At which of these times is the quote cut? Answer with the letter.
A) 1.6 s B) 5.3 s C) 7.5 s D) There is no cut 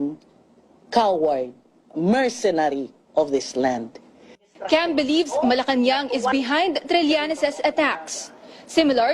C